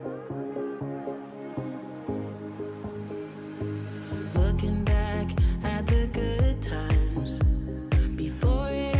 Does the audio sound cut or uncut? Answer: uncut